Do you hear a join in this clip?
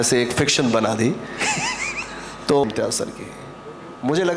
yes; 1 cut; at 2.6 s

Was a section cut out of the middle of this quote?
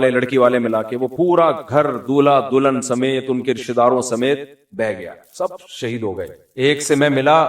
yes; 1 cut; at 6.4 s

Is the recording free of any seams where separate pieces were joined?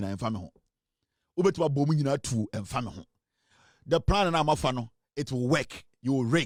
yes; 0 cuts

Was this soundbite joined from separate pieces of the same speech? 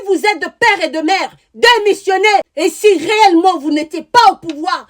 yes; 1 cut; at 2.5 s

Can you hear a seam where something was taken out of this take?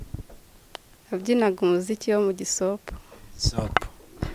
no; 0 cuts

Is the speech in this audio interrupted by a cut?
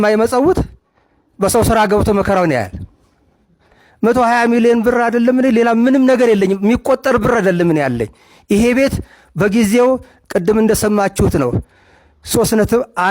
yes; 1 cut; at 3.8 s

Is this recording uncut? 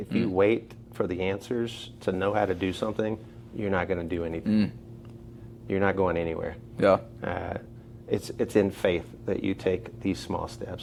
yes; 0 cuts

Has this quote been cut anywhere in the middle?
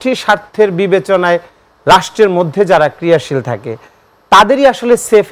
no; 0 cuts

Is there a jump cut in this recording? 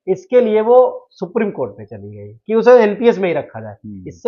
no; 0 cuts

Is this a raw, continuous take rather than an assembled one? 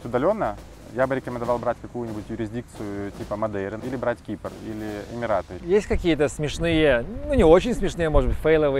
no; 2 cuts; at 3.8 s, 5.5 s

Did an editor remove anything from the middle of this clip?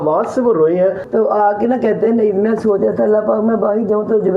yes; 1 cut; at 1.0 s

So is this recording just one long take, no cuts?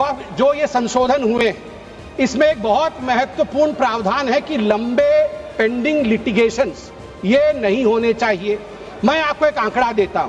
yes; 0 cuts

